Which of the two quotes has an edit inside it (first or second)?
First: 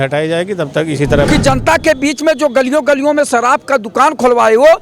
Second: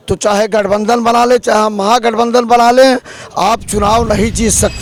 first